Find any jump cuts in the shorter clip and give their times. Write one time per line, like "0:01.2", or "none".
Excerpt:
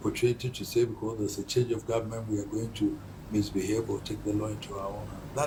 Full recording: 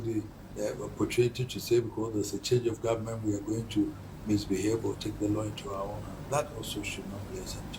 none